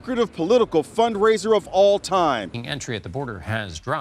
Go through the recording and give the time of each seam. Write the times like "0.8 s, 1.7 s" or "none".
2.4 s